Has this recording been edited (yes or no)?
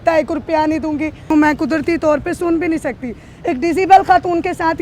yes